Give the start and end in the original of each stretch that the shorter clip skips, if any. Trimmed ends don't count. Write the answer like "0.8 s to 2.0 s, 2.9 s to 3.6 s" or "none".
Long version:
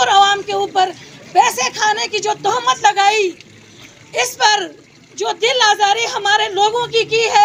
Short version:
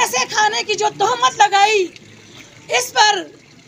none